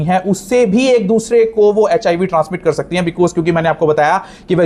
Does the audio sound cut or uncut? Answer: uncut